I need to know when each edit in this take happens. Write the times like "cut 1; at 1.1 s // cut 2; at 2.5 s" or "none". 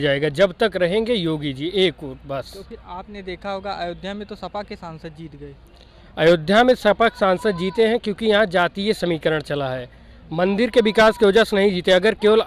none